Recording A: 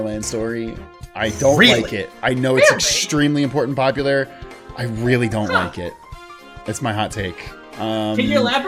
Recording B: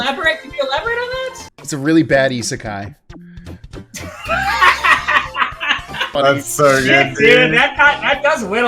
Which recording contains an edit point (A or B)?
B